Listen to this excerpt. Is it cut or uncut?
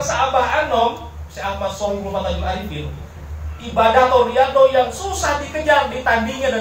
uncut